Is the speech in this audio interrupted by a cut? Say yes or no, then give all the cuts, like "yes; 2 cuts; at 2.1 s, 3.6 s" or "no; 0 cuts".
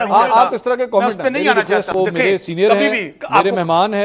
yes; 1 cut; at 1.9 s